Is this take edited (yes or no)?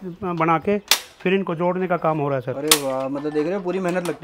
no